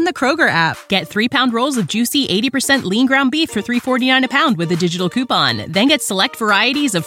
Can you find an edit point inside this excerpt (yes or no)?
no